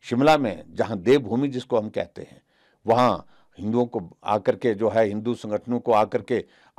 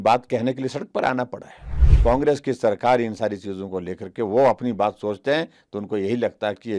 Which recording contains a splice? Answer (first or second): second